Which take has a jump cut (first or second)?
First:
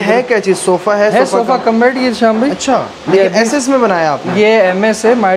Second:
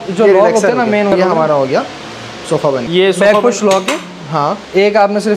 second